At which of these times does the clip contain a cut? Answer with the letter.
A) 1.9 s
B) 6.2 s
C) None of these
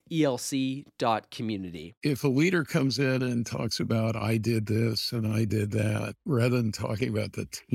A